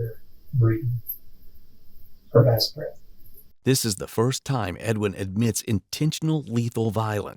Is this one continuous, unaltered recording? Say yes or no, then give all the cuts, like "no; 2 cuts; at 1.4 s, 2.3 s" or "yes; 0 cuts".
yes; 0 cuts